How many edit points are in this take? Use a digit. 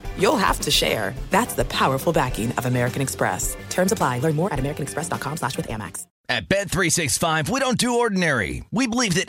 1